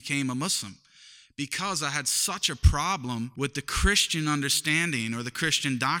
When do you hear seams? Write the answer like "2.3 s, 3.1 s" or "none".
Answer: 3.3 s